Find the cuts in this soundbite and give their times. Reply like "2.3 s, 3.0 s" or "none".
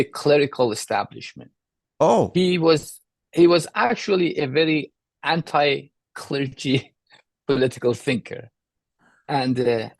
none